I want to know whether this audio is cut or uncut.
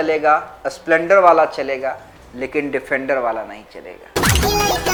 uncut